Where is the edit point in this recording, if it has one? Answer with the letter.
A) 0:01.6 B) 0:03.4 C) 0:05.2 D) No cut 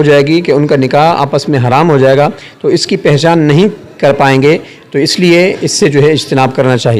D